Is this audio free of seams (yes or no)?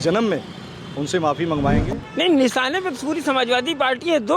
no